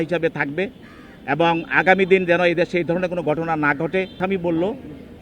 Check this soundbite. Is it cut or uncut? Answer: cut